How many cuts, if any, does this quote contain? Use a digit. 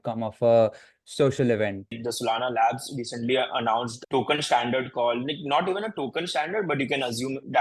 2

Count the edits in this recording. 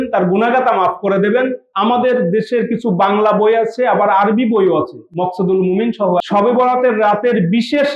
2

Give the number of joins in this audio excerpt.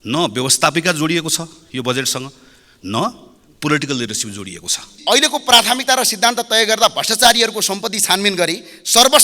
1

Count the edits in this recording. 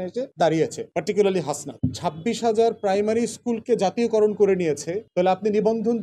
1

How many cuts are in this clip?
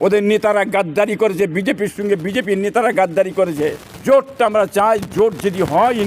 1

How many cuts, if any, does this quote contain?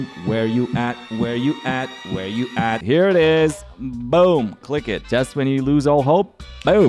2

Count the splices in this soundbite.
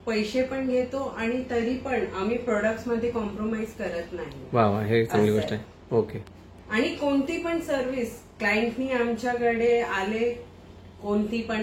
0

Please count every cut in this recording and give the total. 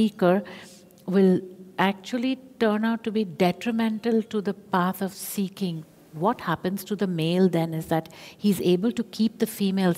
1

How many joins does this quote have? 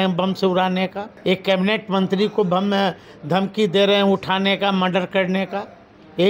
1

